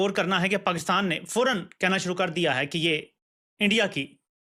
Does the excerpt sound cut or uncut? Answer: uncut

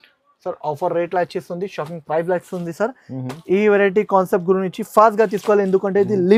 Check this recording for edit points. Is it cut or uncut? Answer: uncut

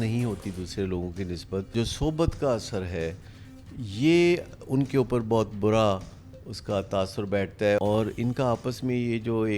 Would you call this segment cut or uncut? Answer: cut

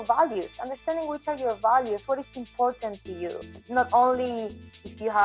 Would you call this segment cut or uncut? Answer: cut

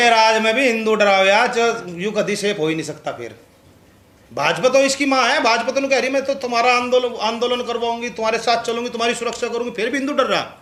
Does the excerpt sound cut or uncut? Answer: uncut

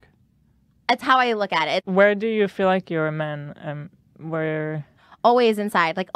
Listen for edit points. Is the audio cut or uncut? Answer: cut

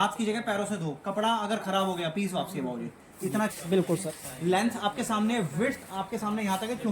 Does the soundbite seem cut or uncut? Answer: cut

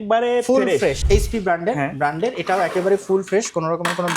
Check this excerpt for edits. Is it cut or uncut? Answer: cut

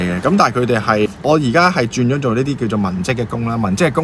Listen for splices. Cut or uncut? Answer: cut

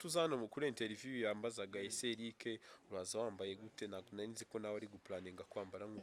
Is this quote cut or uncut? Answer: uncut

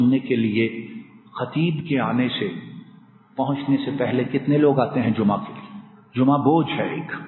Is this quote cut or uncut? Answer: uncut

